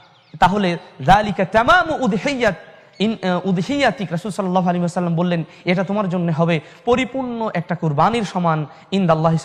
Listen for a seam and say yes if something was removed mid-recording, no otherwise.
no